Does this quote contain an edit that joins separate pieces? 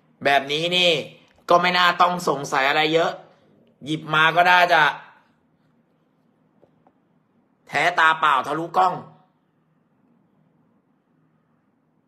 no; 0 cuts

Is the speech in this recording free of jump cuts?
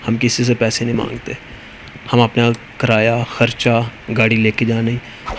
yes; 0 cuts

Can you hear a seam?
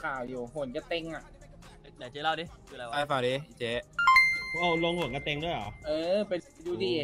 no; 0 cuts

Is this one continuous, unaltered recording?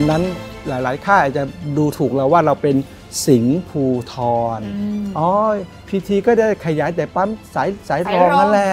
no; 1 cut; at 5.7 s

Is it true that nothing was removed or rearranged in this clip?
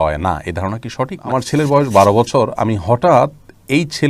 no; 1 cut; at 1.2 s

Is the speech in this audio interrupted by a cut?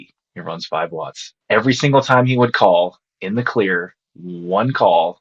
no; 0 cuts

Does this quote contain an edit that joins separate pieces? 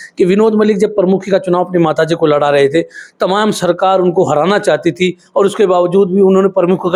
no; 0 cuts

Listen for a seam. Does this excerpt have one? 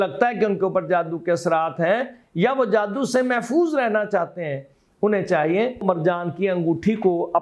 yes; 1 cut; at 5.8 s

